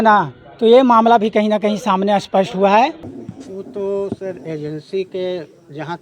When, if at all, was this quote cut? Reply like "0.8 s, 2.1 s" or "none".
3.2 s